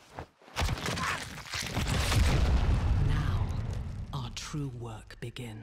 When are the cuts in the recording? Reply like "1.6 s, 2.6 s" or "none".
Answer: none